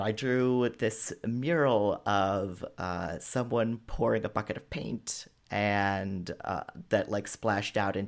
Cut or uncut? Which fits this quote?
uncut